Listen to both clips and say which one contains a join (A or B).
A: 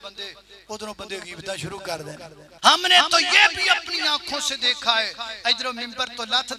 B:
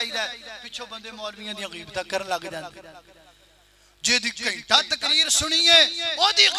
A